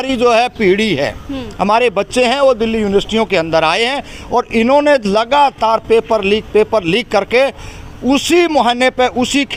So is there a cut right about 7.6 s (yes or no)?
no